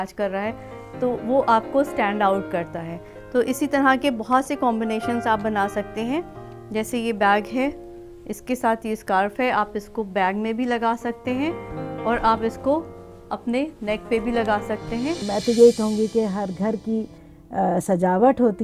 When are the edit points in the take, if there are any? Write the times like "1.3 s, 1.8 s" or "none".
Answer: 15.3 s